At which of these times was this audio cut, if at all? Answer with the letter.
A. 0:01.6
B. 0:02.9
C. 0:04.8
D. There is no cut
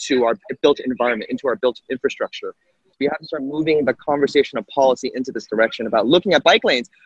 B